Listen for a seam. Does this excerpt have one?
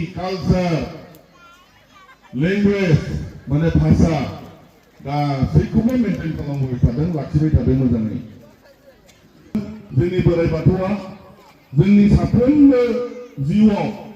yes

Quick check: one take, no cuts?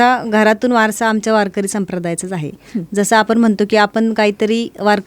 yes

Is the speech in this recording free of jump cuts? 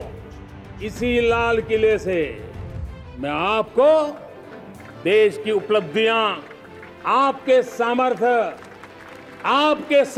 yes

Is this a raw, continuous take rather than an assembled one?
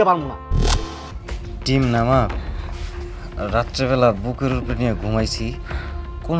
no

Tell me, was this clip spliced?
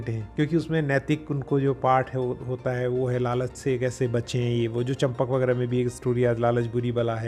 no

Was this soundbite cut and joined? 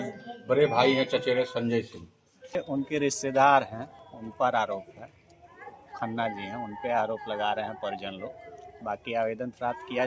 yes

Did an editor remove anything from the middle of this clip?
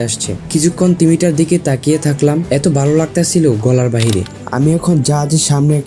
yes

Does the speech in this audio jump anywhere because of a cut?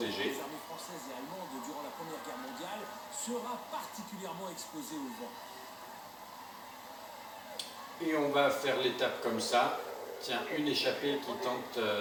no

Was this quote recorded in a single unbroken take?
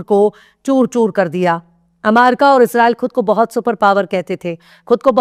yes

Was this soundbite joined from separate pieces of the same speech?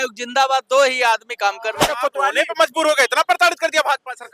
yes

